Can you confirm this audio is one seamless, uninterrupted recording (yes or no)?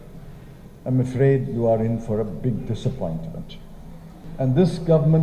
no